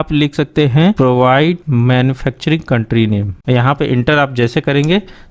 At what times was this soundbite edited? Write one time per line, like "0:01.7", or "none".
0:01.6
0:03.3